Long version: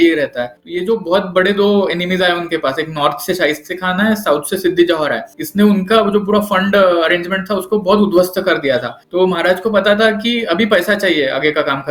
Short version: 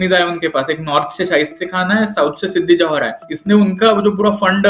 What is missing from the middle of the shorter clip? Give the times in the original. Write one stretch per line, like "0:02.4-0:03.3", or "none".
none

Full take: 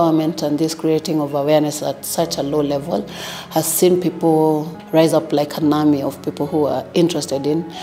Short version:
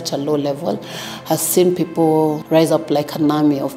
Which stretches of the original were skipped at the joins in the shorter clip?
0:04.7-0:04.8

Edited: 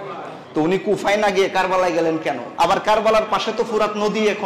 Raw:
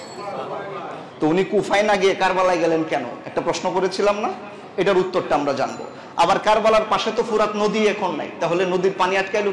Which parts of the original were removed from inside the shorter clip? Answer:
0:03.1-0:06.0

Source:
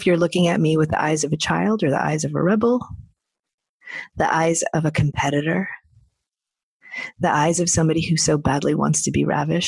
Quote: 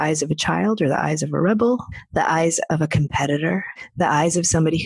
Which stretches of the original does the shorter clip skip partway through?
0:03.0-0:04.0
0:05.8-0:07.0

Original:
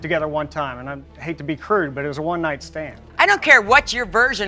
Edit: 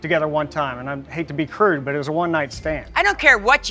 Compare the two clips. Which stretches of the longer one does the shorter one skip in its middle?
0:01.0-0:01.1
0:02.9-0:03.1

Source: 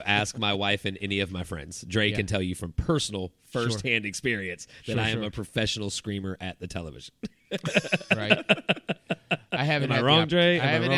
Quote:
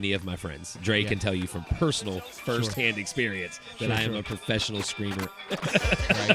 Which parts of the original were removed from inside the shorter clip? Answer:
0:06.4-0:07.4

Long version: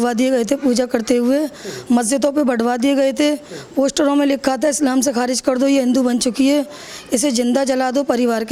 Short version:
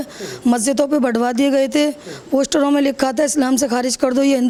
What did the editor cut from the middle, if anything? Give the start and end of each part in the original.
none

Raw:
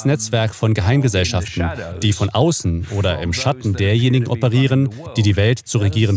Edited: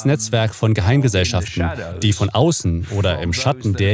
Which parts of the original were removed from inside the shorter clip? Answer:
none

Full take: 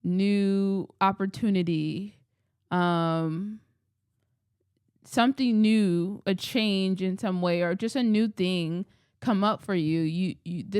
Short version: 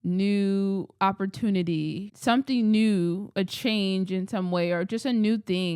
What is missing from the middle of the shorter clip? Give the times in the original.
0:02.1-0:05.0

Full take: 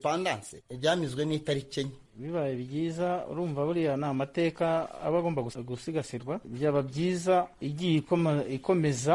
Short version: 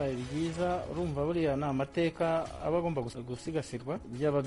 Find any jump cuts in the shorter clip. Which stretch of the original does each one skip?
none

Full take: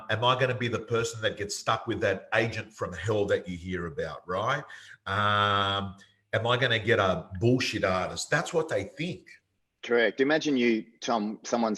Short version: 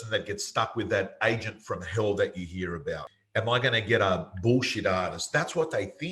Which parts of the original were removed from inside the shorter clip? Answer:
0:04.2-0:06.0

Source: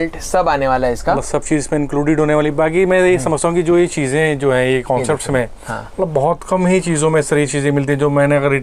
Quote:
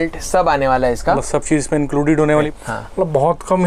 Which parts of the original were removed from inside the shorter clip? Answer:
0:02.5-0:05.5

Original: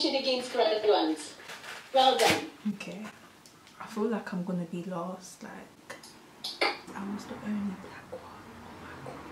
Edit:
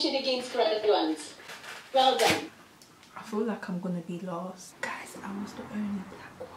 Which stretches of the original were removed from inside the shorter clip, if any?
0:02.5-0:03.2
0:05.8-0:06.8

